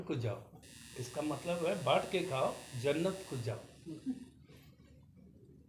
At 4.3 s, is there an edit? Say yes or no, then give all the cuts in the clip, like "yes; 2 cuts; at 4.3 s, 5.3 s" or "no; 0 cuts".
no; 0 cuts